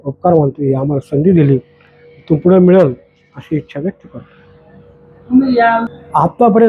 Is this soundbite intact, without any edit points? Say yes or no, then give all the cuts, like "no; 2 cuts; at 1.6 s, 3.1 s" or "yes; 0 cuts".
yes; 0 cuts